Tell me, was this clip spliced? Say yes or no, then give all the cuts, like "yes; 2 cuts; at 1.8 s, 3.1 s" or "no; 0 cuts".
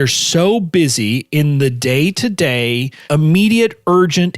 yes; 1 cut; at 3.0 s